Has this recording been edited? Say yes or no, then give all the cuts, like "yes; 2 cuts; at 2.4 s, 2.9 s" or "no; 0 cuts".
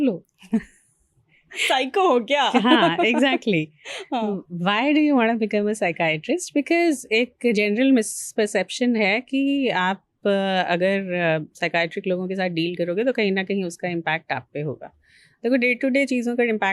no; 0 cuts